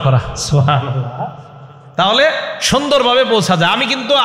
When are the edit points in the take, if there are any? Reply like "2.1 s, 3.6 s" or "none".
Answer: none